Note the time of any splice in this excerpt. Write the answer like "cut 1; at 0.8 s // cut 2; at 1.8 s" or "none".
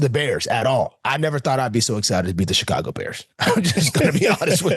cut 1; at 1.0 s